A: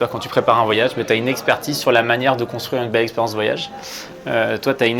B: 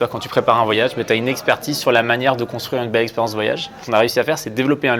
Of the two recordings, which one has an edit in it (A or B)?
B